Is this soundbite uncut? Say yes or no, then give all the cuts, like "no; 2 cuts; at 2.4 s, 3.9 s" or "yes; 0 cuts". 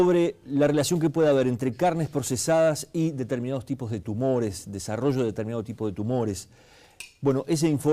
no; 1 cut; at 1.6 s